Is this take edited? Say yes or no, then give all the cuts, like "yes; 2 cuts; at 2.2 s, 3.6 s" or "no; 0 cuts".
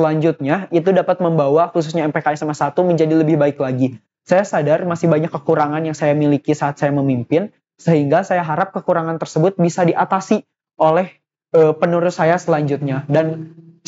no; 0 cuts